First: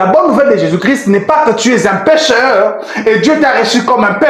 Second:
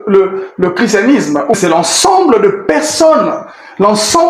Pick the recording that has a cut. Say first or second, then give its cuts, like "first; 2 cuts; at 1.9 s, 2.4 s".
second; 1 cut; at 1.5 s